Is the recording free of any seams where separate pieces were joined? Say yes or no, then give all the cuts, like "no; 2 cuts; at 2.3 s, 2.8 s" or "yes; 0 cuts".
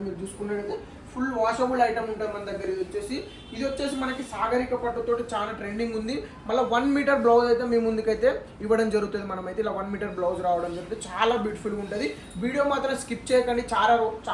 yes; 0 cuts